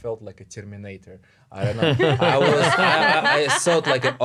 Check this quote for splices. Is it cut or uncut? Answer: uncut